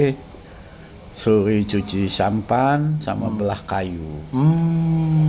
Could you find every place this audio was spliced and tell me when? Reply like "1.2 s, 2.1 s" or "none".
none